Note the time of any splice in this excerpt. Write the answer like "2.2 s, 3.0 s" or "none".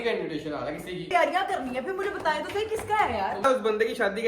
1.1 s, 3.4 s